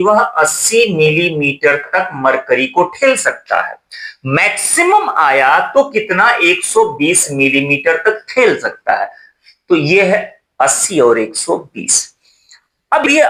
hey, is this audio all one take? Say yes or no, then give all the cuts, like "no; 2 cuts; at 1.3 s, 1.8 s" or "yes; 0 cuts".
yes; 0 cuts